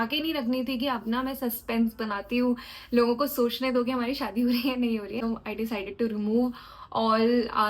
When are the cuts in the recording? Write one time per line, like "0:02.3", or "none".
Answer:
0:05.2